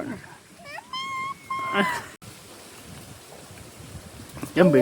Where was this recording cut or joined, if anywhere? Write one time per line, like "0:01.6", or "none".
0:02.2